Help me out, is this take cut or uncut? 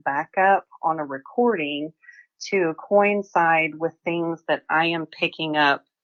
uncut